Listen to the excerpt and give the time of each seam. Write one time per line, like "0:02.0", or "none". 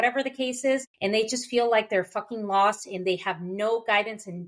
0:00.9